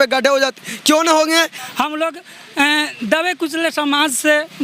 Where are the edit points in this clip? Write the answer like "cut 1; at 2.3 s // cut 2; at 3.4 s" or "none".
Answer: cut 1; at 1.6 s